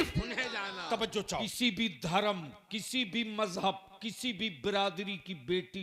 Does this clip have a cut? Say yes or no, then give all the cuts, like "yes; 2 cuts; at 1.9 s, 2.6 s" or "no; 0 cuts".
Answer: yes; 1 cut; at 1.5 s